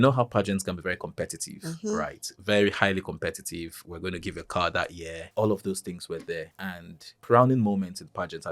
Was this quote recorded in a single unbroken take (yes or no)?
no